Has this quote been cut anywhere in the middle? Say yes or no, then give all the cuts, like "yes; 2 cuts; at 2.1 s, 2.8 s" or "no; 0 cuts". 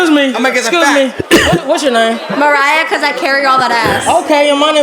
no; 0 cuts